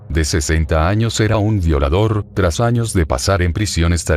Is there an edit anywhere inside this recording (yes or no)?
yes